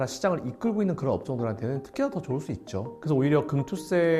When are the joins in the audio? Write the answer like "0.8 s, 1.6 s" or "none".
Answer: 2.9 s